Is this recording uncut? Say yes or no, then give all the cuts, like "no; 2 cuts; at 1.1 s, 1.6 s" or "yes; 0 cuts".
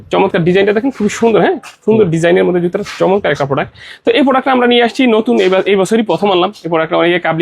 yes; 0 cuts